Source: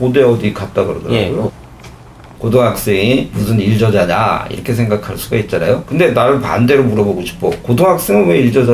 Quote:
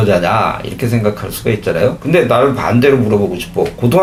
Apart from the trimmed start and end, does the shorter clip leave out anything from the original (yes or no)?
no